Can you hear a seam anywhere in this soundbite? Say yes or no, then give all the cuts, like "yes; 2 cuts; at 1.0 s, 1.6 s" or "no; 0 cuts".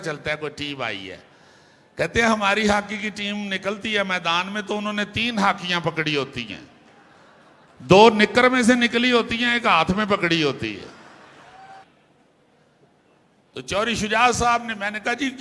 yes; 1 cut; at 11.8 s